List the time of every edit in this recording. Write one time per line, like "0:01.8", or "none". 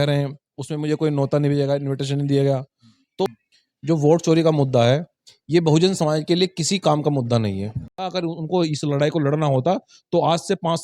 0:03.3
0:07.8